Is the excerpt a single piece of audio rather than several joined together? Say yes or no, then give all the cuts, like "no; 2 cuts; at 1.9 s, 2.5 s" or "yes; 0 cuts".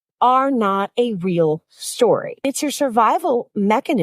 no; 1 cut; at 2.4 s